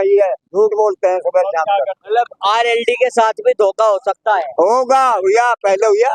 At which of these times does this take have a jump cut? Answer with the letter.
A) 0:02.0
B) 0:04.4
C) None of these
A